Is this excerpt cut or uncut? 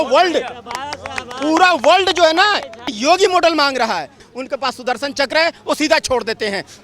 cut